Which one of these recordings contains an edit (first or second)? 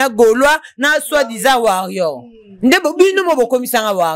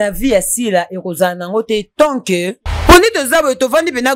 second